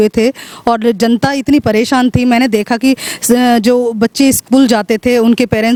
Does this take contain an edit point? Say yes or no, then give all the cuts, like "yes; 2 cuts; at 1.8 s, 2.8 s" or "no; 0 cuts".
no; 0 cuts